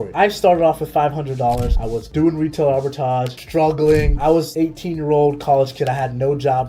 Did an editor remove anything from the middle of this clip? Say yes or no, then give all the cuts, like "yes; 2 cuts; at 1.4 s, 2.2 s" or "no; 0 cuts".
yes; 2 cuts; at 2.1 s, 4.3 s